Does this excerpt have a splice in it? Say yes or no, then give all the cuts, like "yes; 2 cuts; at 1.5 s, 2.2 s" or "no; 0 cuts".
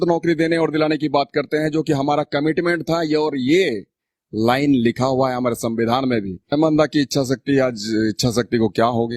yes; 1 cut; at 6.5 s